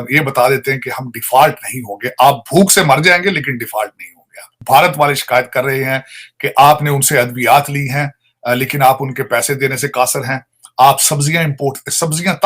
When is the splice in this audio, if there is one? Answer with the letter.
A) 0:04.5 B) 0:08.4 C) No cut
A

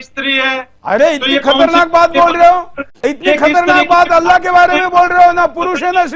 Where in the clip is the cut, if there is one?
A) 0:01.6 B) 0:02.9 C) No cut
B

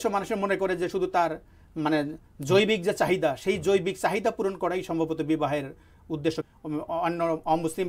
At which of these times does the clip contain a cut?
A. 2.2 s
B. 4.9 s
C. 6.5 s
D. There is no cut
C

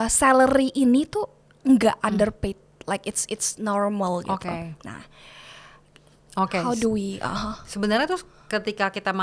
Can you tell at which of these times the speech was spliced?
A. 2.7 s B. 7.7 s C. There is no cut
C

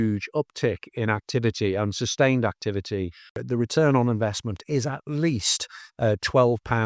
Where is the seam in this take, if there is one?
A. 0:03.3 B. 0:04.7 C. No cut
A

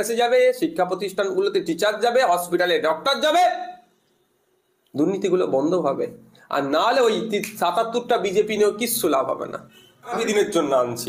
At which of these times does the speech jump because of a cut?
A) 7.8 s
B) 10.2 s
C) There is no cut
B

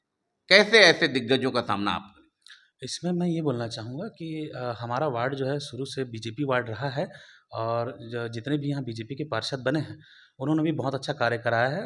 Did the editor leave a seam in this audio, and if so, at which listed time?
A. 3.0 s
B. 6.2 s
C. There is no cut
C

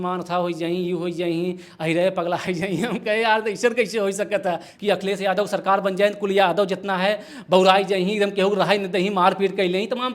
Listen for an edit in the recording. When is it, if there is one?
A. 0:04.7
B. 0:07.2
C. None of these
A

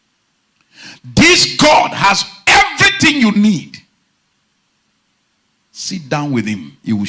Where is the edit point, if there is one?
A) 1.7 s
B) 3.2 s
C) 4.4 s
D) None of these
D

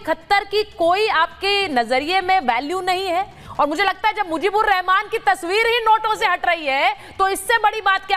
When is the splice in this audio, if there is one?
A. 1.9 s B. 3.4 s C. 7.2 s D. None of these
B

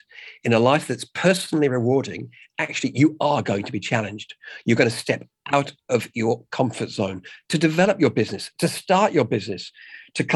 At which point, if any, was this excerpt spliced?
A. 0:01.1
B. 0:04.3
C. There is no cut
C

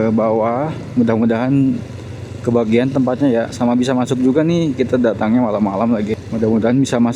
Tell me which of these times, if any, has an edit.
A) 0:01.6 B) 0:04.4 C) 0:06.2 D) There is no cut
C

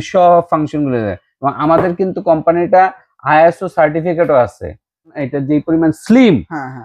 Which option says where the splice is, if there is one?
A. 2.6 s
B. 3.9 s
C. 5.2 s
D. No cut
C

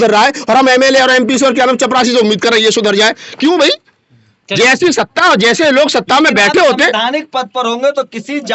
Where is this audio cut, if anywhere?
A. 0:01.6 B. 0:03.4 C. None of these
C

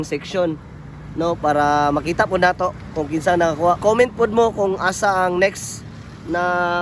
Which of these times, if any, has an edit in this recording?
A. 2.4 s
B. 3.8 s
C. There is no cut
B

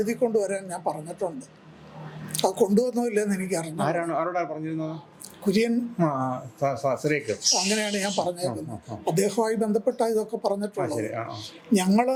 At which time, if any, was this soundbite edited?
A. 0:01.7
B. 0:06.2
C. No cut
C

